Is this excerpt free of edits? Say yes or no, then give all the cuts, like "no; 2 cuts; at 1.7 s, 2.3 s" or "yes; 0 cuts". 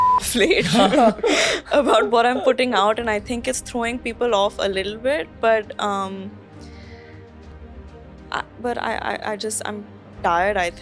yes; 0 cuts